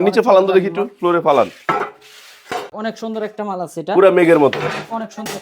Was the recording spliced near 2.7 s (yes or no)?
yes